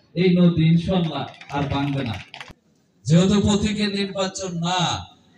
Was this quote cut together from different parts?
yes; 1 cut; at 2.3 s

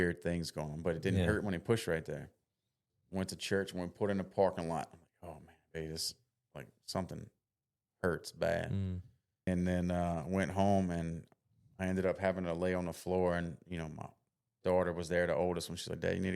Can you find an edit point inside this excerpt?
yes; 2 cuts; at 2.9 s, 9.5 s

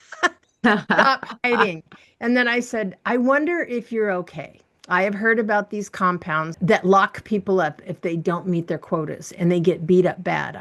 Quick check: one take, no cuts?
no; 1 cut; at 6.5 s

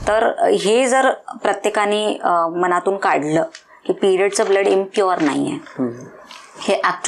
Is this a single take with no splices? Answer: yes; 0 cuts

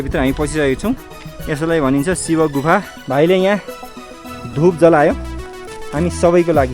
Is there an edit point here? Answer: yes; 1 cut; at 3.0 s

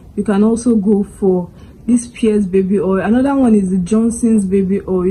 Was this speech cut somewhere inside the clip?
no; 0 cuts

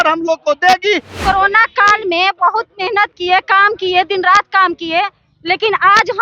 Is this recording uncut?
no; 1 cut; at 1.1 s

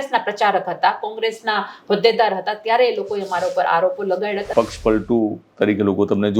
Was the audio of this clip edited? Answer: yes; 1 cut; at 4.4 s

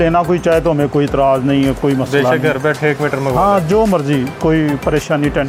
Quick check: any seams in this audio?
no; 0 cuts

